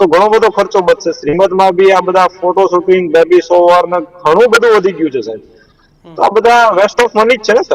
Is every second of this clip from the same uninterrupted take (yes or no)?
yes